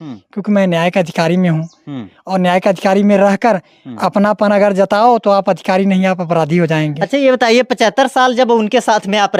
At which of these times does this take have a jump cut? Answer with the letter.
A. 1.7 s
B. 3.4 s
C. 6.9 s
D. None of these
D